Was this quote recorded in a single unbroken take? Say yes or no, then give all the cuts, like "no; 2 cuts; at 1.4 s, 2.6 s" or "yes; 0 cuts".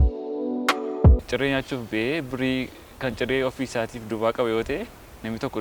no; 1 cut; at 1.2 s